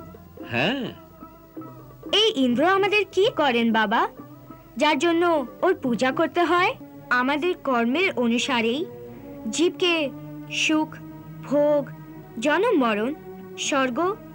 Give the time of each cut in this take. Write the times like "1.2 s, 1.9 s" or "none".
6.9 s

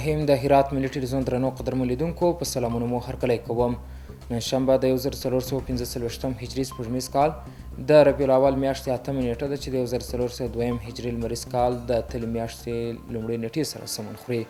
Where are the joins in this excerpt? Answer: none

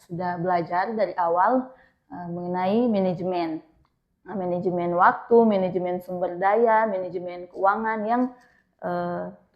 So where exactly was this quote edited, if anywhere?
none

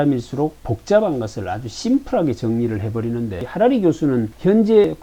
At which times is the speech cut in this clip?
none

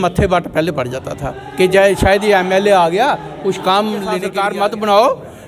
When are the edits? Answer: 4.3 s

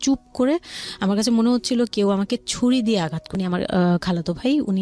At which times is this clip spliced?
3.2 s

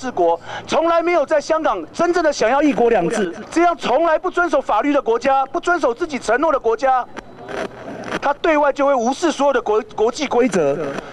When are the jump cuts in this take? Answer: 3.4 s

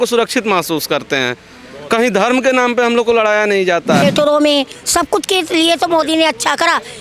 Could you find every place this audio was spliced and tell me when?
4.0 s

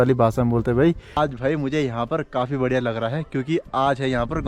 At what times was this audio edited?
1.2 s

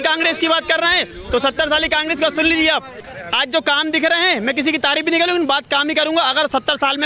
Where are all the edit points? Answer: 3.0 s

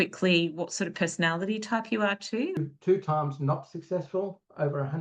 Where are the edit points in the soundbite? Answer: 2.6 s

